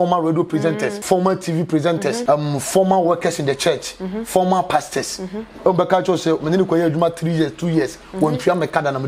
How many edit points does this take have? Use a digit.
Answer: 2